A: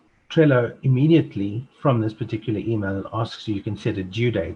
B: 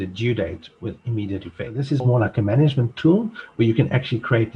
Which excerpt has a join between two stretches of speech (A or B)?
B